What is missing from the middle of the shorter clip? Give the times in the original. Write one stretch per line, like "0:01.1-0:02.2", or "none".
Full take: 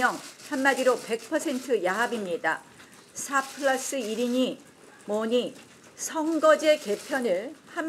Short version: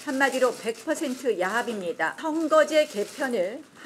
0:02.6-0:06.1